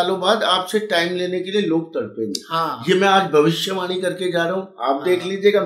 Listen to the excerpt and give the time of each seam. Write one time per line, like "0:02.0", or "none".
none